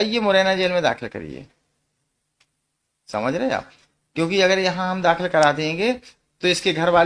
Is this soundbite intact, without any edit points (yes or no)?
yes